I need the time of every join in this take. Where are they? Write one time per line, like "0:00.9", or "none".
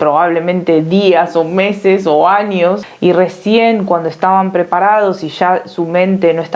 0:02.9